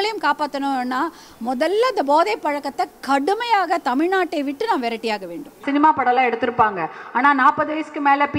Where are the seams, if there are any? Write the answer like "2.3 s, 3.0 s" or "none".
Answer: 5.6 s